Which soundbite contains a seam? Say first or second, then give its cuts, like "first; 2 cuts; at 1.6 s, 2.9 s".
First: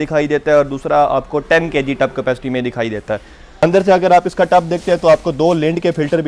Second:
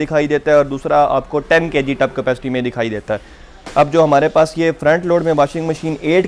first; 1 cut; at 3.6 s